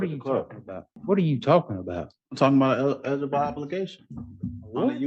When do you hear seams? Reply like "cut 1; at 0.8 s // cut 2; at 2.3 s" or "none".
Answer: cut 1; at 0.9 s